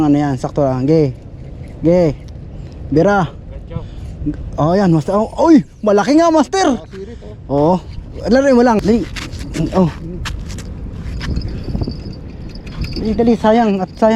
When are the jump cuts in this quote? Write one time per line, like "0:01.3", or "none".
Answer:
0:08.8